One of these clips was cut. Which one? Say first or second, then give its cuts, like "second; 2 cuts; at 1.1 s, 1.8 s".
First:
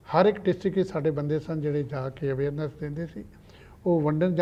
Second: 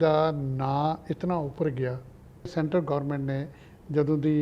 second; 1 cut; at 2.5 s